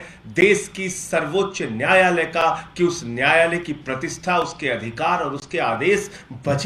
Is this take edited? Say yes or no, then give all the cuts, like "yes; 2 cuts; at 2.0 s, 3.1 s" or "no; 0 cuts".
no; 0 cuts